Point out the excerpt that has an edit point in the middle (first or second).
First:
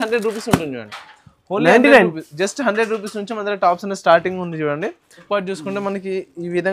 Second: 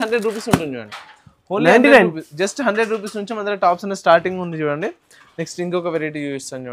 first